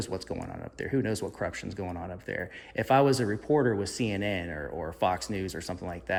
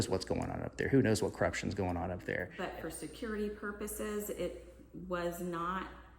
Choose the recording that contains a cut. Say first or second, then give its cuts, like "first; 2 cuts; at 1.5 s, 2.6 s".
second; 1 cut; at 2.5 s